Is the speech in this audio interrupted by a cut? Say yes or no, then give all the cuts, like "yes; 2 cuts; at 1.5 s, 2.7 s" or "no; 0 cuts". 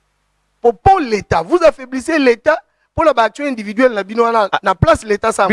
no; 0 cuts